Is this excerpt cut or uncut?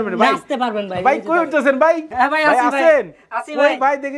cut